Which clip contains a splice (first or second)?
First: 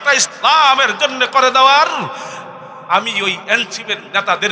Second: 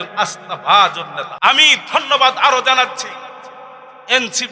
second